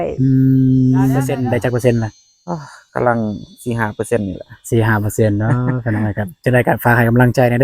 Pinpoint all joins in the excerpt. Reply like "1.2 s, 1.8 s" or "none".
1.3 s